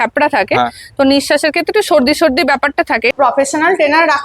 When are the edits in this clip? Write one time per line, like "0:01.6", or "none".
0:03.1

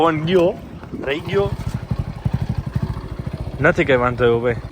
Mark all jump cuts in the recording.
0:02.6

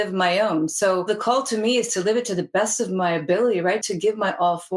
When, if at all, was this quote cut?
0:01.0
0:03.9

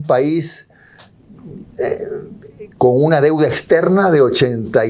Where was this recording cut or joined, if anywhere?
none

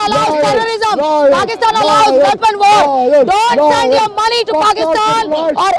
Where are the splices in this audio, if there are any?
none

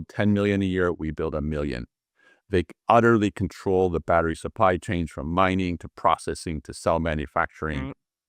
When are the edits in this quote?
none

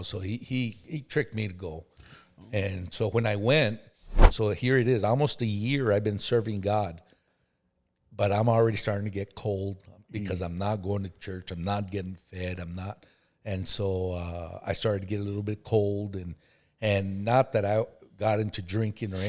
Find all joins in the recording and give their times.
0:04.3

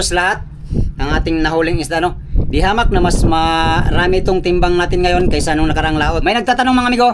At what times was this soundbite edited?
0:06.2

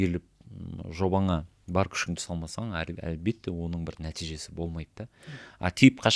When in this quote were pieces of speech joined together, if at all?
none

